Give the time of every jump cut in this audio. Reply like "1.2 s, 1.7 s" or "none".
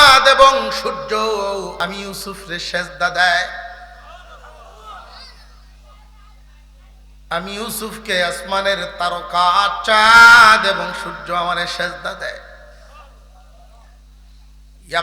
1.8 s